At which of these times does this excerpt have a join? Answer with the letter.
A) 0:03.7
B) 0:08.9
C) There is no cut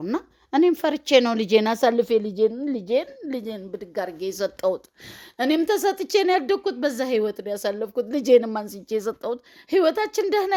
C